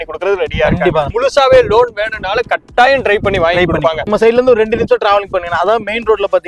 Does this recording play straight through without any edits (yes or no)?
no